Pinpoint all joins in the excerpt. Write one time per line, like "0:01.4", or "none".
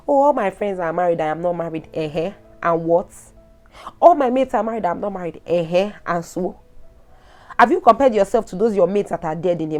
none